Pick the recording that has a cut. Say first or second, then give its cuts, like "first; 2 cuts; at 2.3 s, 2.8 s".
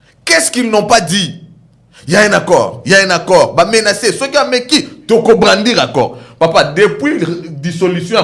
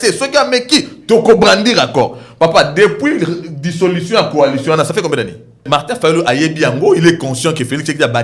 second; 1 cut; at 5.6 s